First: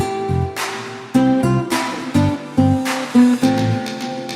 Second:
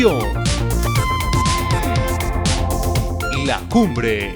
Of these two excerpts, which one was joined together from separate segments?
first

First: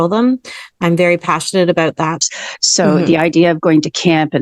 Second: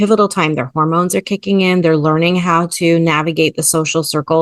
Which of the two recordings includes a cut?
first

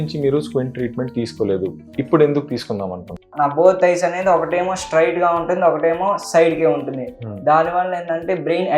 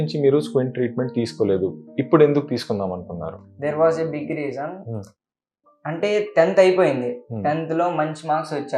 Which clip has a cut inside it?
first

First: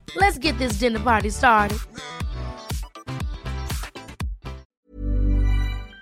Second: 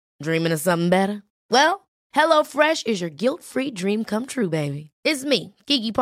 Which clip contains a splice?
first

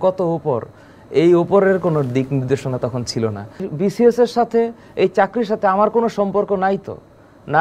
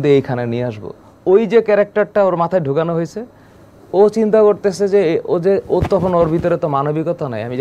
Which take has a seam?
first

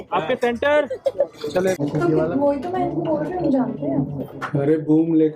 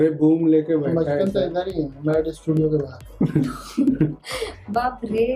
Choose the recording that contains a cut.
first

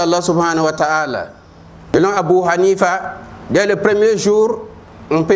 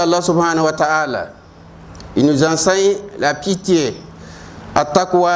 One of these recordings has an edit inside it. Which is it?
first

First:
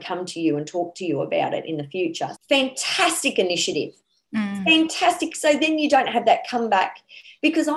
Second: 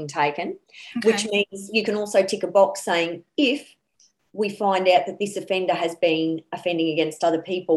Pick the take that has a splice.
first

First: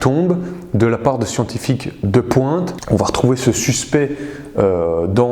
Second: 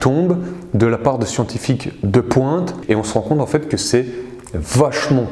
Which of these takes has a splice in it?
first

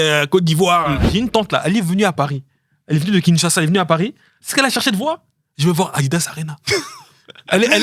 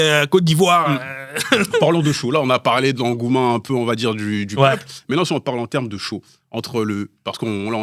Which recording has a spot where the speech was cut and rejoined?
first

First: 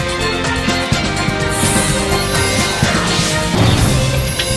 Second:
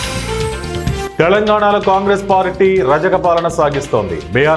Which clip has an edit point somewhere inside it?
second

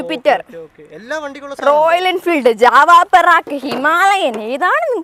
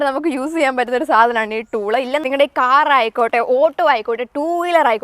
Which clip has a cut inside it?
second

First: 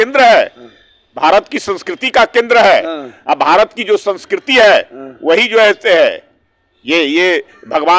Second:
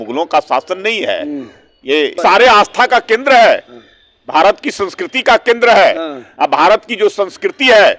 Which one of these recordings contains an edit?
second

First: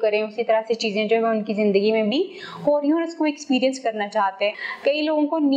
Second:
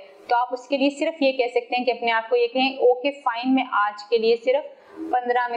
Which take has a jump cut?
first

